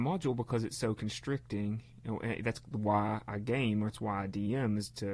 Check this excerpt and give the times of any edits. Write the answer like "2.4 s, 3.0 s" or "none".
none

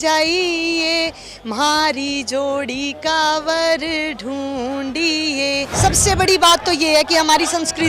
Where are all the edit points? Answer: 5.7 s

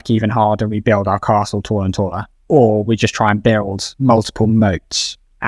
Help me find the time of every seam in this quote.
none

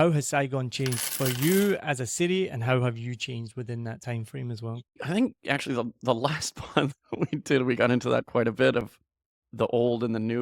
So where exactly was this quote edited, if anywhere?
5.0 s

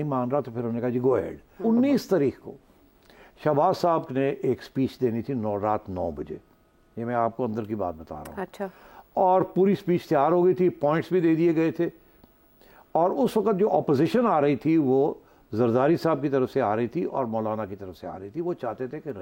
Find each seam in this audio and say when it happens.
1.4 s

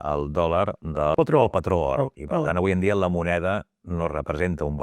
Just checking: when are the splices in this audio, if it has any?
1.1 s, 2.1 s

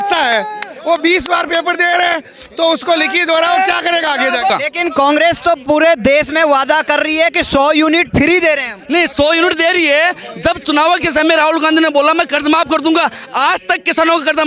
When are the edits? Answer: 4.5 s

